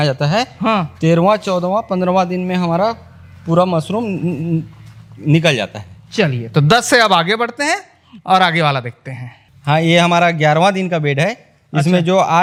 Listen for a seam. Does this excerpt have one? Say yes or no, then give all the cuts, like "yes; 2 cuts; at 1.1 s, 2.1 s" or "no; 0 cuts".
no; 0 cuts